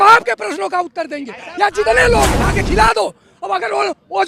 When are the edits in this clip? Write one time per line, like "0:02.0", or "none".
0:02.4